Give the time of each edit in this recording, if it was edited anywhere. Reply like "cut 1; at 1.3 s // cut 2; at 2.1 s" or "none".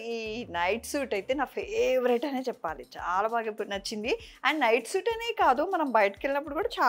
none

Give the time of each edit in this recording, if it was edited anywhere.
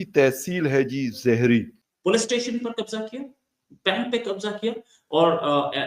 cut 1; at 1.7 s

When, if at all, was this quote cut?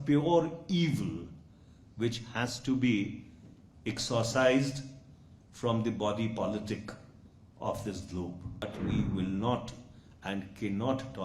cut 1; at 8.6 s

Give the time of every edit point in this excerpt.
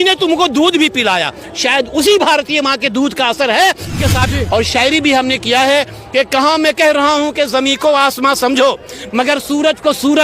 cut 1; at 4.3 s

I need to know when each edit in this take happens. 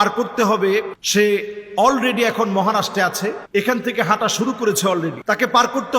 cut 1; at 1.0 s // cut 2; at 3.4 s // cut 3; at 5.2 s

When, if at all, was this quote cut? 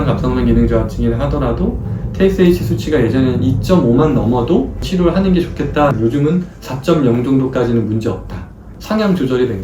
cut 1; at 4.8 s // cut 2; at 8.7 s

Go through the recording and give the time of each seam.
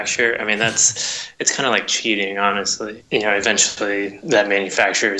cut 1; at 2.9 s // cut 2; at 4.2 s

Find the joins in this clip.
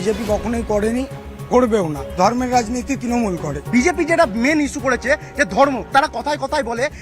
cut 1; at 3.6 s // cut 2; at 5.9 s

